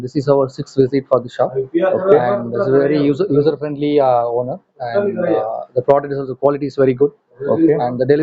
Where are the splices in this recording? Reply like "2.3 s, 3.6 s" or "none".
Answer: none